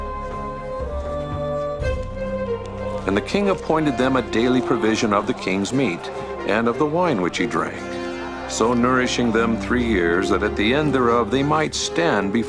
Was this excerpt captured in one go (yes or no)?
no